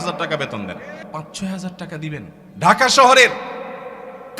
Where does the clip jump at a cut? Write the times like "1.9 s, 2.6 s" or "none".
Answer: 1.0 s, 2.4 s